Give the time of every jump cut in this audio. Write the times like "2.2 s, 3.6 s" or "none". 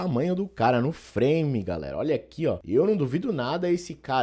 2.6 s